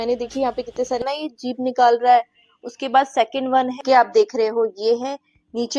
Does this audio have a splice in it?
yes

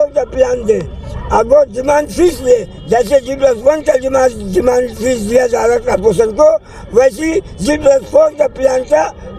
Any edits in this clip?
no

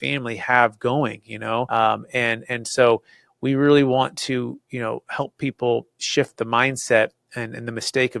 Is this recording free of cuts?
no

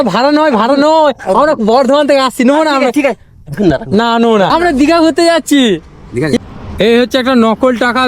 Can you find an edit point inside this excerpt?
yes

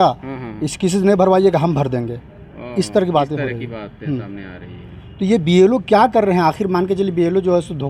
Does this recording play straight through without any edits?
yes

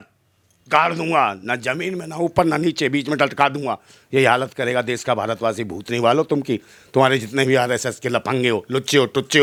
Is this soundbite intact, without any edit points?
yes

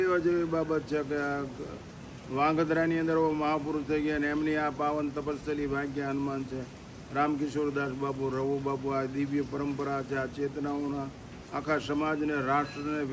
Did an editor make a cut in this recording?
no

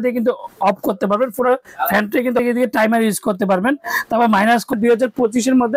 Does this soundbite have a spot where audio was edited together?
yes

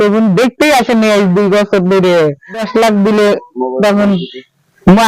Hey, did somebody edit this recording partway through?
yes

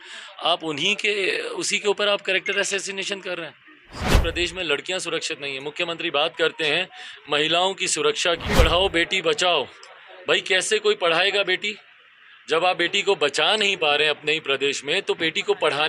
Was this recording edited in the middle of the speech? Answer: yes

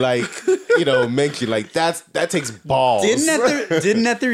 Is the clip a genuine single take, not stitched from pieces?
yes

